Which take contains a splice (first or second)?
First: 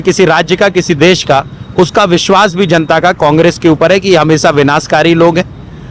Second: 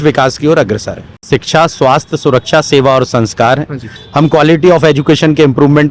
second